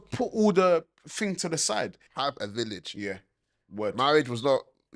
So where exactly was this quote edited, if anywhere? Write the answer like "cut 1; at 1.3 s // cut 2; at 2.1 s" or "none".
cut 1; at 2.0 s